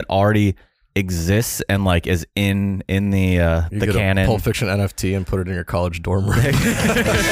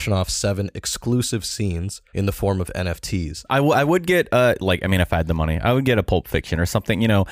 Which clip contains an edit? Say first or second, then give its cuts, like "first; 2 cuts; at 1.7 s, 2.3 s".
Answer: second; 2 cuts; at 2.0 s, 3.5 s